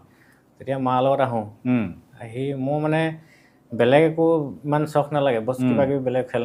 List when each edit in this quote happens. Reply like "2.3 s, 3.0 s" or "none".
none